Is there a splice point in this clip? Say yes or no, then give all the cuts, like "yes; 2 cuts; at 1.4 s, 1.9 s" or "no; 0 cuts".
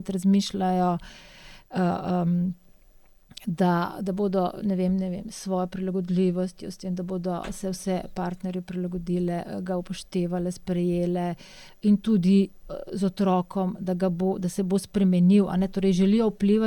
no; 0 cuts